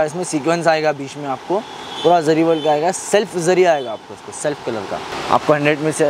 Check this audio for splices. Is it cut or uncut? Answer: uncut